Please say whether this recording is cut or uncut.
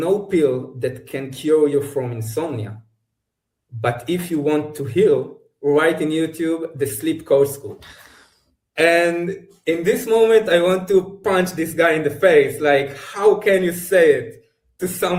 uncut